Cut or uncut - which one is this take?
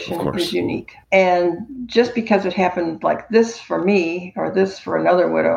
cut